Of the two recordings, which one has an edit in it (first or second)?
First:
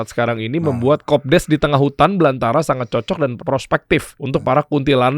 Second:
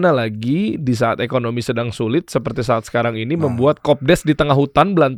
first